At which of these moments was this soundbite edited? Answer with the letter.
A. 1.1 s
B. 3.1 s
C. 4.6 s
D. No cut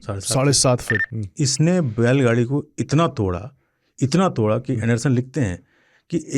A